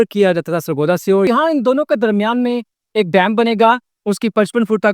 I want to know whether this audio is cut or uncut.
cut